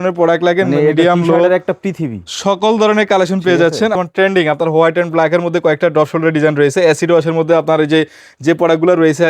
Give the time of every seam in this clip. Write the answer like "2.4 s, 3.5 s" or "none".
3.9 s